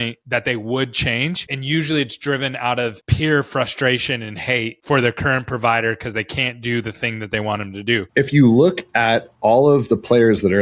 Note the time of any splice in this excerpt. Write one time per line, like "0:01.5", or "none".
0:01.5
0:08.1